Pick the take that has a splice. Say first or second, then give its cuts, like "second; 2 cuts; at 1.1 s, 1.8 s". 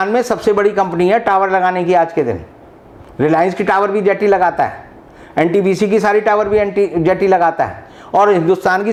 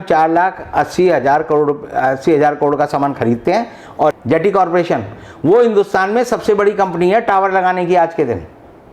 second; 1 cut; at 4.1 s